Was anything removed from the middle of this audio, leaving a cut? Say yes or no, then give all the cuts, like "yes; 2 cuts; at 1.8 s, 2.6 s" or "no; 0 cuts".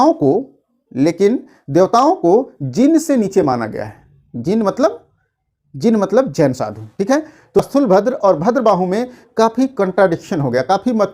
yes; 1 cut; at 7.7 s